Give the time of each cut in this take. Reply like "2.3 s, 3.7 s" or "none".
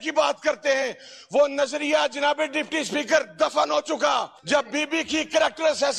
4.4 s